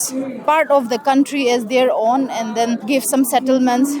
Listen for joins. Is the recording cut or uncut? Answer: cut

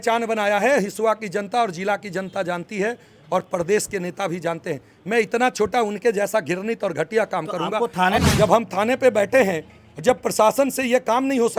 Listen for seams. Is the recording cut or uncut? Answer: cut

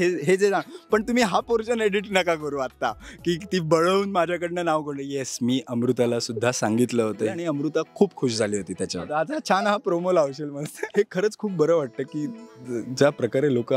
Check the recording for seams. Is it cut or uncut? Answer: cut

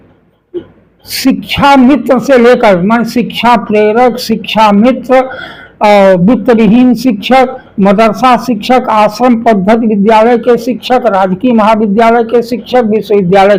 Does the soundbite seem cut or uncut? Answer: uncut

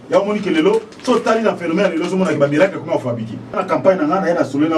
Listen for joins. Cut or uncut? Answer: cut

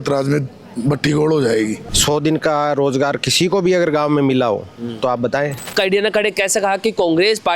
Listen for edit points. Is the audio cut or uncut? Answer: cut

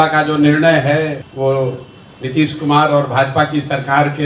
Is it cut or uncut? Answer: cut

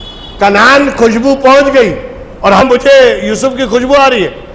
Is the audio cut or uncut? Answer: cut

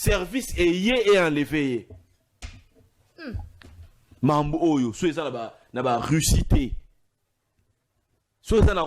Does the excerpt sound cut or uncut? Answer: uncut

